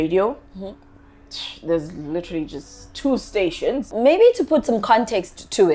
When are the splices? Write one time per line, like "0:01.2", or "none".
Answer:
none

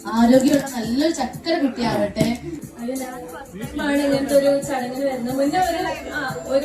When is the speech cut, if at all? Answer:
0:02.5

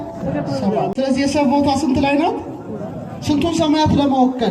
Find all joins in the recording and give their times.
0:00.9

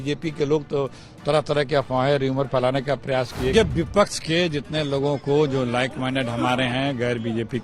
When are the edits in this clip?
0:03.5

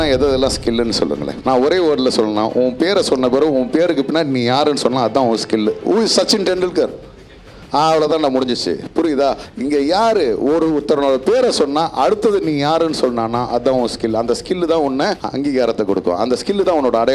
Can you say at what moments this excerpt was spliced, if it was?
0:05.8

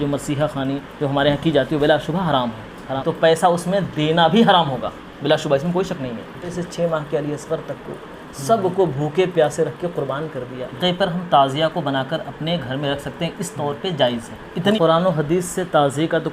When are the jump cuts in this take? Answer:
0:03.0
0:06.5
0:10.8
0:14.6

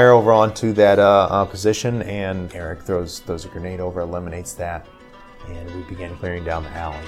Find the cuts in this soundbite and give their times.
0:02.5
0:06.1

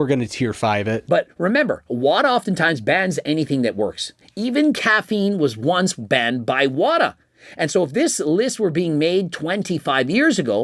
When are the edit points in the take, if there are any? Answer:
none

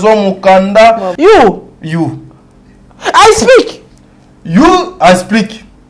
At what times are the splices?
0:01.1

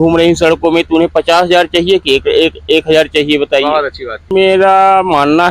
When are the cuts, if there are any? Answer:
0:04.3

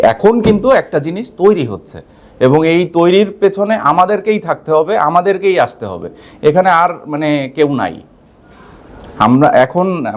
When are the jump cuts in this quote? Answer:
none

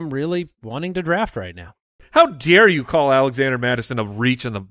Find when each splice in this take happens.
0:02.0

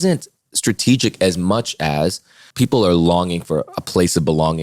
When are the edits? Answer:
0:02.4

